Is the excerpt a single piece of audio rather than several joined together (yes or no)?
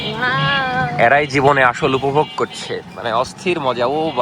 yes